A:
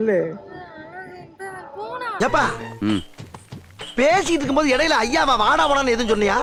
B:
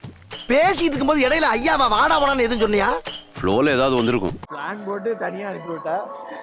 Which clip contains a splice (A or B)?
B